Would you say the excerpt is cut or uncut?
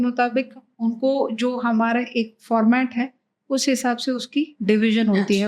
cut